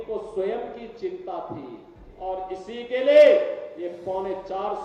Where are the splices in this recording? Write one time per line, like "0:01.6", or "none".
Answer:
0:02.0